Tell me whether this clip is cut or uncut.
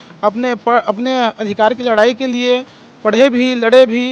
uncut